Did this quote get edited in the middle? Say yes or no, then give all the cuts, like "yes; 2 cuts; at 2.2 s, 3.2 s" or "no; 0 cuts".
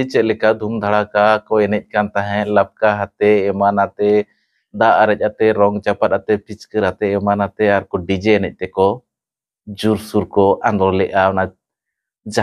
no; 0 cuts